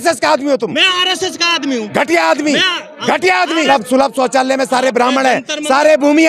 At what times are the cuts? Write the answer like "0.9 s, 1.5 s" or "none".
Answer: 3.7 s